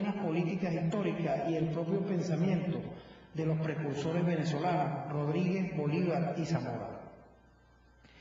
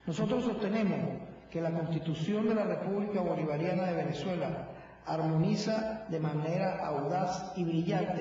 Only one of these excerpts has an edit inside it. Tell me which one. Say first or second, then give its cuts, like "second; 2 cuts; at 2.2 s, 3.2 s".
second; 1 cut; at 5.2 s